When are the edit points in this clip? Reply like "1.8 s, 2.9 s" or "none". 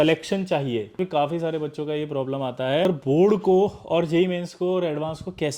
1.0 s, 2.9 s